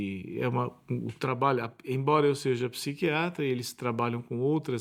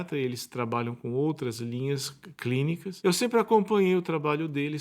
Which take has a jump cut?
second; 1 cut; at 2.9 s

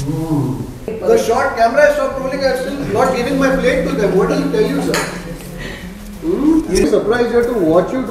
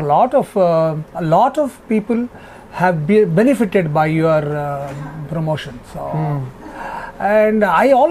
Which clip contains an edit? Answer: first; 1 cut; at 0.9 s

